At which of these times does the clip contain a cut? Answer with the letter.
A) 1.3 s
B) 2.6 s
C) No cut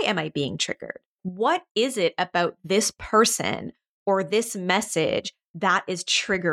A